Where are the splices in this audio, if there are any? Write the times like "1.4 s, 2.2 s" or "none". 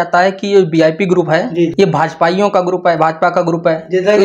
1.7 s